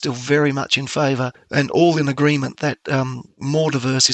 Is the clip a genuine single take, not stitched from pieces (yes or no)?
yes